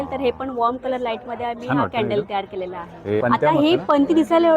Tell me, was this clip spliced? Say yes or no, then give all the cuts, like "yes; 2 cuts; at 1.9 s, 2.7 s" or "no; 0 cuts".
yes; 1 cut; at 3.2 s